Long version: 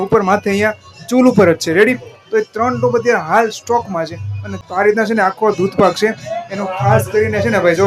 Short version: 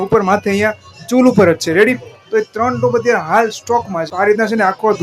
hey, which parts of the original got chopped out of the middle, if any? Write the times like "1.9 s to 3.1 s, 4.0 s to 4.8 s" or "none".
4.1 s to 4.7 s